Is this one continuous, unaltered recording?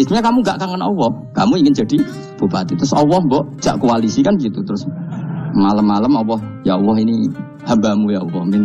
no; 3 cuts; at 1.2 s, 3.5 s, 6.5 s

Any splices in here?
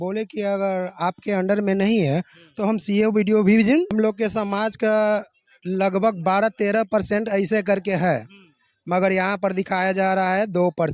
yes; 1 cut; at 3.9 s

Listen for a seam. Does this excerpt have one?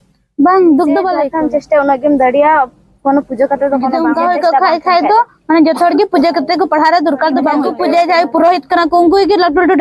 yes; 3 cuts; at 1.2 s, 3.9 s, 7.7 s

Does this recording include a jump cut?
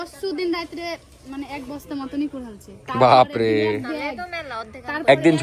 no; 0 cuts

